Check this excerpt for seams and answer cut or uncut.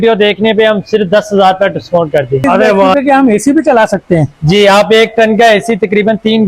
cut